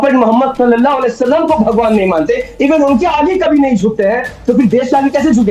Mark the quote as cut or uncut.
uncut